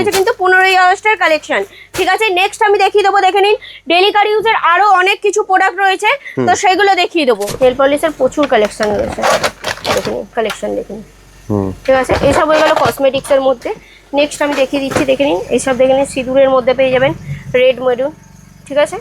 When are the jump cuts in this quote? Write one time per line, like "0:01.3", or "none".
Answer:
0:07.5